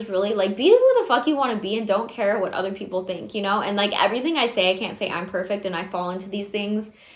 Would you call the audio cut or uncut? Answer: uncut